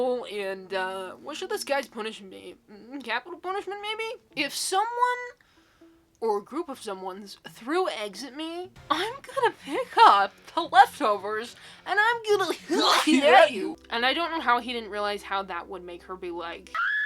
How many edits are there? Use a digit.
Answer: 2